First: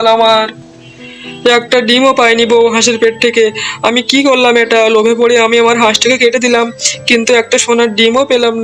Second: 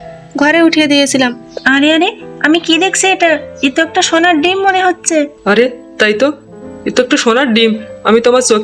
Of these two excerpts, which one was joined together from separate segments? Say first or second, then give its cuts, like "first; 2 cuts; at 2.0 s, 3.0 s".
second; 2 cuts; at 1.5 s, 5.4 s